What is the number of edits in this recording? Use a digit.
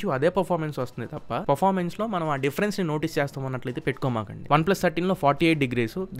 2